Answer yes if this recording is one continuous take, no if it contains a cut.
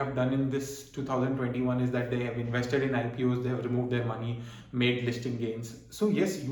yes